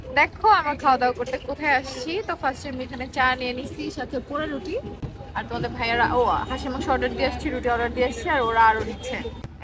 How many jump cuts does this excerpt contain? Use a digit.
0